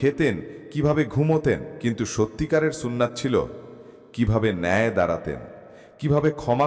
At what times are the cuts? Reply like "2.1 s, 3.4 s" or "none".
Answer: 1.7 s